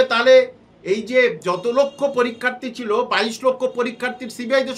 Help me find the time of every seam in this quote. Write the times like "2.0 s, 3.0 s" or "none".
none